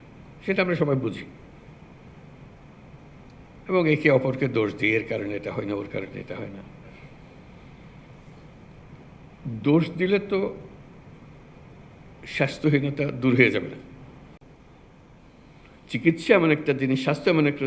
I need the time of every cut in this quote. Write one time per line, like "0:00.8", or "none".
0:14.4